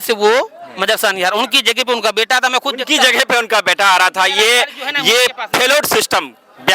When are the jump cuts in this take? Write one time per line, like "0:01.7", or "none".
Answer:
none